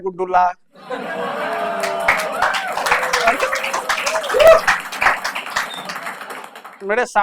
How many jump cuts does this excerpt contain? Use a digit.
0